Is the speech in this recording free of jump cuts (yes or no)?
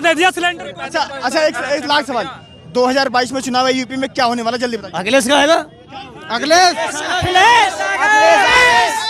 yes